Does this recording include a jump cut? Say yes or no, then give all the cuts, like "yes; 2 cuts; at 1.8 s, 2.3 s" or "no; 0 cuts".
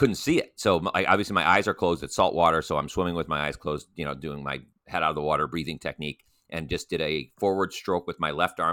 no; 0 cuts